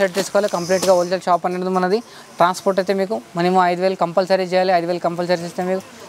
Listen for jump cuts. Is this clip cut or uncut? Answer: uncut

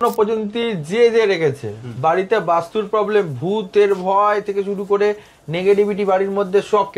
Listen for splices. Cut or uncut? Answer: uncut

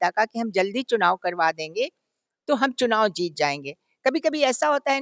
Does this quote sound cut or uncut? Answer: uncut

